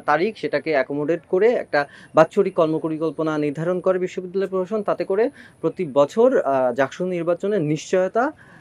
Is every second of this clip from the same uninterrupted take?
yes; 0 cuts

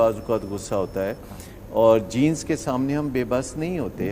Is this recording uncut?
yes; 0 cuts

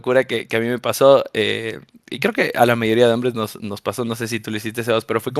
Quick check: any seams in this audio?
no; 0 cuts

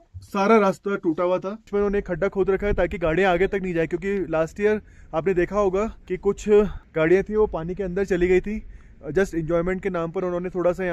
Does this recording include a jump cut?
yes; 3 cuts; at 1.7 s, 6.0 s, 6.8 s

